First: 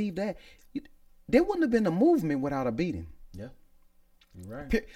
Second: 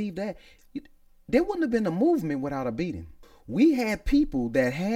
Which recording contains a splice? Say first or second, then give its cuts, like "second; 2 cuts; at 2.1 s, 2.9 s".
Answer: second; 1 cut; at 3.3 s